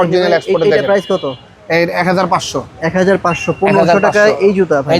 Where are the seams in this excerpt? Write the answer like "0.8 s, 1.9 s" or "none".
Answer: none